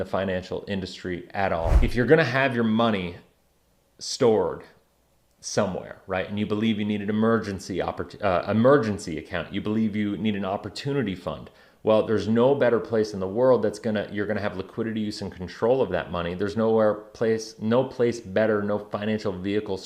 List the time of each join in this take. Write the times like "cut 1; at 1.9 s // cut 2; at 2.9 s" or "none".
cut 1; at 1.8 s